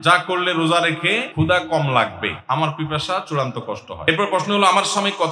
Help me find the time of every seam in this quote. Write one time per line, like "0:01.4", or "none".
0:01.3
0:02.3
0:04.1